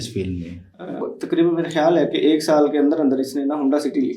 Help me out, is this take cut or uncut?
cut